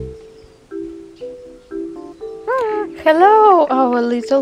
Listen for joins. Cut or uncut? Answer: uncut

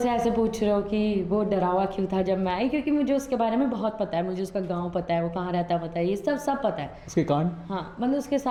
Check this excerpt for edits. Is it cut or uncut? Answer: uncut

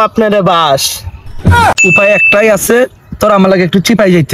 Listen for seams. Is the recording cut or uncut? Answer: cut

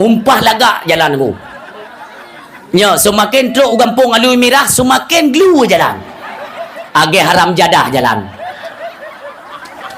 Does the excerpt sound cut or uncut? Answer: uncut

